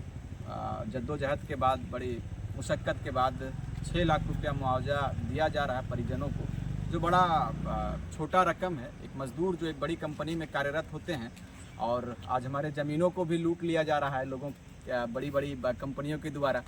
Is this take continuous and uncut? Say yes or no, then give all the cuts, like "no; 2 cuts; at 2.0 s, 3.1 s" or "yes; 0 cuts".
yes; 0 cuts